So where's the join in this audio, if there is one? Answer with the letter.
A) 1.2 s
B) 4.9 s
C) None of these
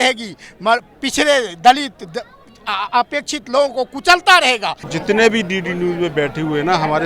B